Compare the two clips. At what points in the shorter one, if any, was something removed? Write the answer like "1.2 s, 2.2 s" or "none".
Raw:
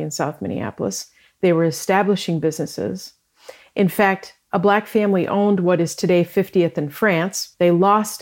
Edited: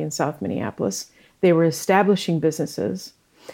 none